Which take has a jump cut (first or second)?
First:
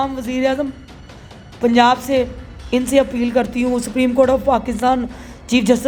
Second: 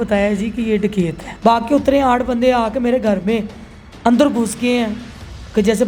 second